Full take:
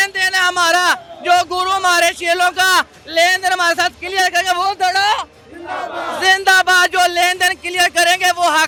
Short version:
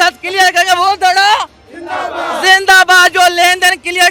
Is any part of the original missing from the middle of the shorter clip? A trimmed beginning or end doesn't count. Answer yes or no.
no